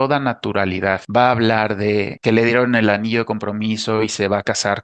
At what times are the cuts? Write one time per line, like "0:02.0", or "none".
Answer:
0:01.0
0:02.1